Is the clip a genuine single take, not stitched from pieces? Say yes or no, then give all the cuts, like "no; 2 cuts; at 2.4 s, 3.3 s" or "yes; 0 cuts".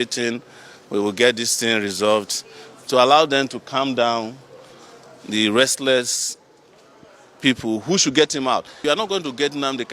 no; 1 cut; at 8.8 s